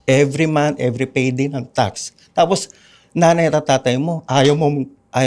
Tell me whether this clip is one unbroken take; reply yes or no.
yes